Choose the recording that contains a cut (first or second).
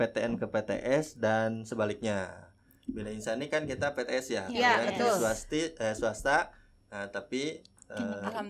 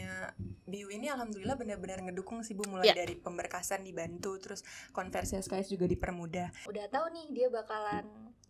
second